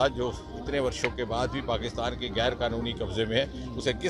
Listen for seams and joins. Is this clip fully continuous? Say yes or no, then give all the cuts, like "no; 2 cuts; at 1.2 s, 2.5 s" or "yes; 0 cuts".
yes; 0 cuts